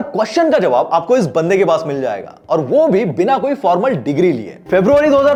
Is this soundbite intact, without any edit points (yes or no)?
yes